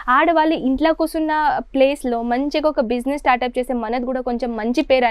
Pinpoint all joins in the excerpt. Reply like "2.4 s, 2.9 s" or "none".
none